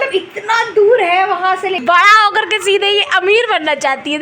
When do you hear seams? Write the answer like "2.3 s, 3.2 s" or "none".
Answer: 1.8 s